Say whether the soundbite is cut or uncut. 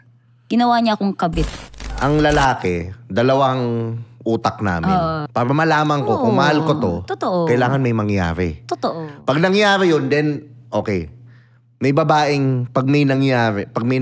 cut